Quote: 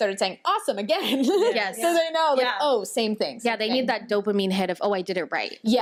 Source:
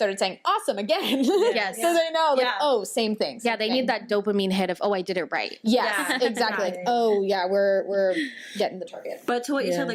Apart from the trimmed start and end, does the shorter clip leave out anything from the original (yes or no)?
no